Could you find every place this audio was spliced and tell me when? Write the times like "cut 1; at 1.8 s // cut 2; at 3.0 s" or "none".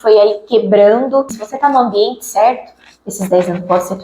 cut 1; at 1.4 s